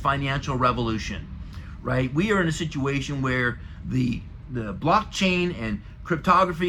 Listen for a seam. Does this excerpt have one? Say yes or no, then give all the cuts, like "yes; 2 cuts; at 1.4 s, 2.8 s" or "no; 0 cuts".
no; 0 cuts